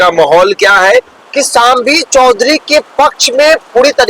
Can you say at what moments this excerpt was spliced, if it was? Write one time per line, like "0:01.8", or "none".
0:01.2